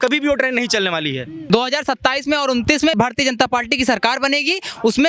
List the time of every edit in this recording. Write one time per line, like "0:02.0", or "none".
0:01.5
0:02.9